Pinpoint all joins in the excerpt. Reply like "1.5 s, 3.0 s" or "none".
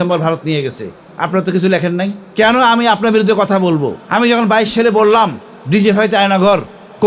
2.2 s, 4.0 s